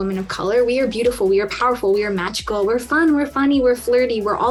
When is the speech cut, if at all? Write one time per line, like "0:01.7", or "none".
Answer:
none